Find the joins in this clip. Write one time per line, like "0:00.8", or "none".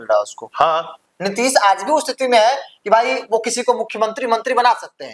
0:01.0